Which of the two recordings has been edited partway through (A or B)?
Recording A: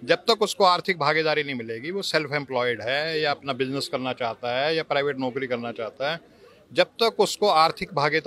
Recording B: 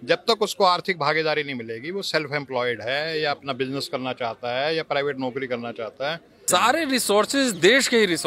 B